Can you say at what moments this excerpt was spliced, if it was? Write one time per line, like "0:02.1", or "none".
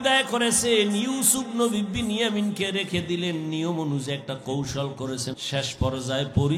0:05.3